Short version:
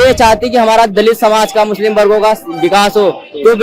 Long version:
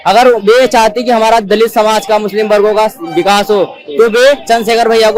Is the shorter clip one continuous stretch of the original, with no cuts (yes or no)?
yes